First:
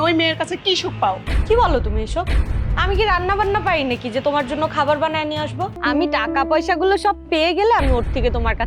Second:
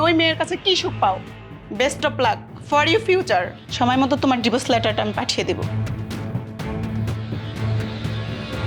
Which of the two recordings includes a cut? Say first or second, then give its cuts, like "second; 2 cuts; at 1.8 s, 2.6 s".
first; 2 cuts; at 1.3 s, 5.8 s